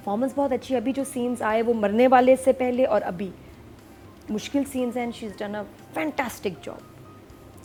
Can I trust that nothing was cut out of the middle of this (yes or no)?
yes